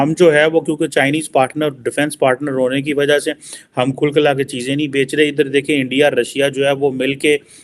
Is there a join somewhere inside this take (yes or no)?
no